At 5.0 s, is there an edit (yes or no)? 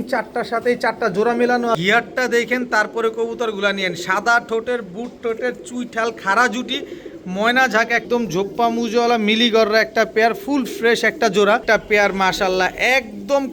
no